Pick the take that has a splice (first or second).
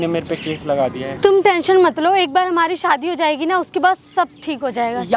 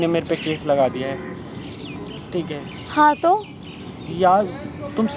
first